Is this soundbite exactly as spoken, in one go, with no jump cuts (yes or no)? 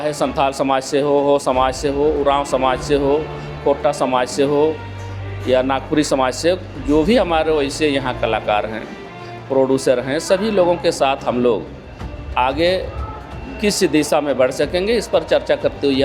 yes